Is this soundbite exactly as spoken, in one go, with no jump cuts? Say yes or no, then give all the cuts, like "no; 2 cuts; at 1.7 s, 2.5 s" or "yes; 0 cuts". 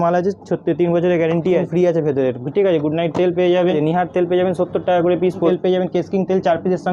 no; 3 cuts; at 1.7 s, 3.7 s, 5.5 s